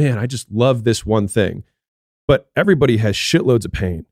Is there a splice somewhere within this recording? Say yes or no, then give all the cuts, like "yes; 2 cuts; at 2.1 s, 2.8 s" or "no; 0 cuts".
no; 0 cuts